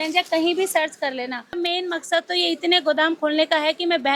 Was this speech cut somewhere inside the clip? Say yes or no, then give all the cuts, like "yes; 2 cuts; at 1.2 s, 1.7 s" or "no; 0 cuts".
yes; 1 cut; at 1.5 s